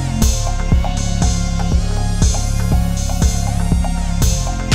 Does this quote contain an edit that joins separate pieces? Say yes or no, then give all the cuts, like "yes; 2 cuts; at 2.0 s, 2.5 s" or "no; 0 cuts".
no; 0 cuts